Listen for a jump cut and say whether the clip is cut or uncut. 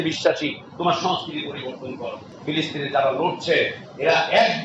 cut